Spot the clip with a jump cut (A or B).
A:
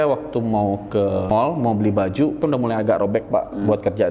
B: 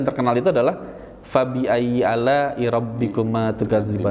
A